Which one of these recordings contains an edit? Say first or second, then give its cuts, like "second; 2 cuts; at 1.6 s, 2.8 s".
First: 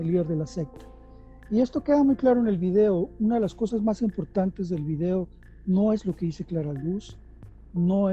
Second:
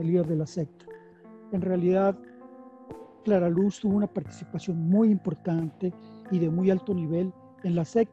second; 1 cut; at 1.3 s